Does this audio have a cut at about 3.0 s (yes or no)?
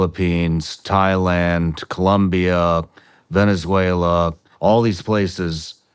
no